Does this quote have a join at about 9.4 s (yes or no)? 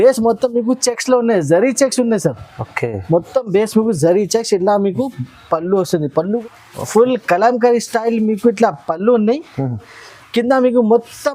no